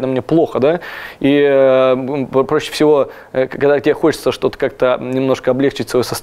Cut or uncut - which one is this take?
uncut